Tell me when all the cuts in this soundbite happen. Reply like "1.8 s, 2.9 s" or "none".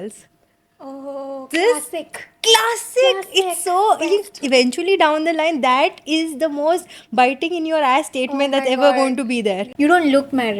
4.3 s, 9.7 s

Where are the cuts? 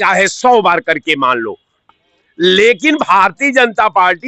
1.9 s

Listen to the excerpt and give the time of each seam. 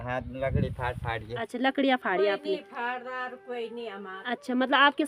none

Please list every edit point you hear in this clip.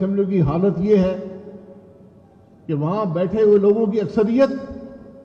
none

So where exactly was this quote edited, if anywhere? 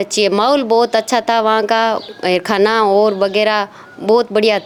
none

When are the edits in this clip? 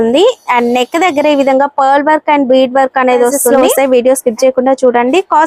3.5 s

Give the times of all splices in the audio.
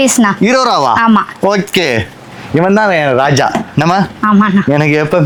none

